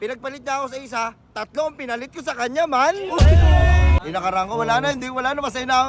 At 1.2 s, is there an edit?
no; 1 cut; at 4.0 s

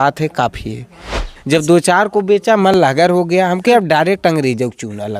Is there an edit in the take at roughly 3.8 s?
no; 1 cut; at 1.3 s

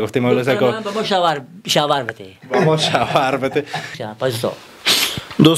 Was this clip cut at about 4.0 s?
yes; 1 cut; at 4.0 s

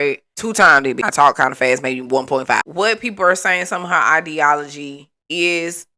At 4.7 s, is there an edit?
no; 2 cuts; at 1.0 s, 2.6 s

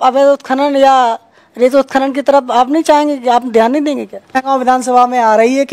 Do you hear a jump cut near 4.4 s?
yes; 1 cut; at 4.4 s

